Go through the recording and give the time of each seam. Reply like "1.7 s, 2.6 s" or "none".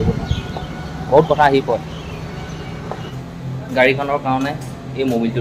3.1 s